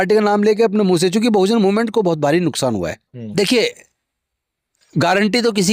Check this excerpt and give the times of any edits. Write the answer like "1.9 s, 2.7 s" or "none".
3.2 s